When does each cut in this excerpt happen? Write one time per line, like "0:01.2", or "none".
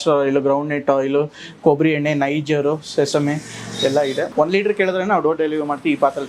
0:04.2